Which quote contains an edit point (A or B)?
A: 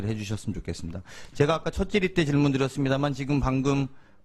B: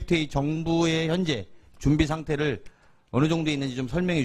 B